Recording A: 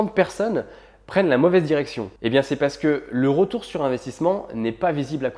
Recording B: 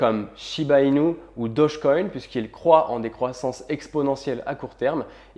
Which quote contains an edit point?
A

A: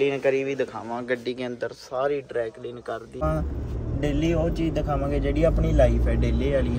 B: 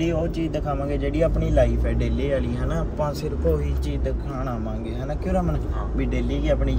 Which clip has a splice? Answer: A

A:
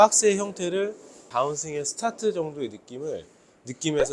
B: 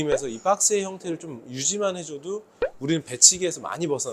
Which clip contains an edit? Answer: A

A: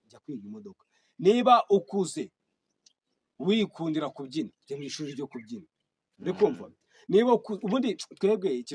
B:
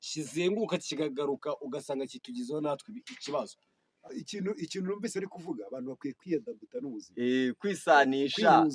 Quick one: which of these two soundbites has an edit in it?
B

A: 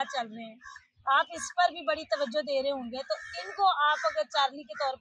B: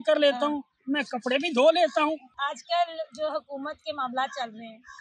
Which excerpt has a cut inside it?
B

